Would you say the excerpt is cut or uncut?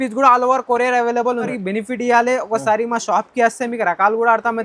cut